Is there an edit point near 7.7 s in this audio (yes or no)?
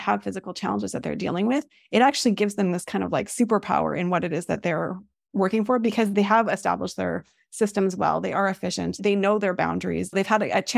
no